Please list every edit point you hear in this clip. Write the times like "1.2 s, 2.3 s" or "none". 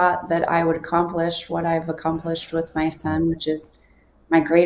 none